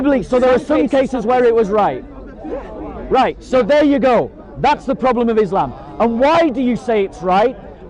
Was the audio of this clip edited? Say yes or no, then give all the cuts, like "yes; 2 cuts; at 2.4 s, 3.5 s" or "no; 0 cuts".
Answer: no; 0 cuts